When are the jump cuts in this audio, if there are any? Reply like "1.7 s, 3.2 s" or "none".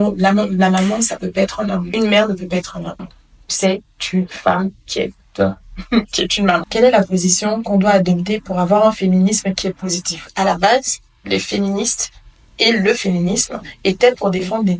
1.9 s, 6.7 s, 10.3 s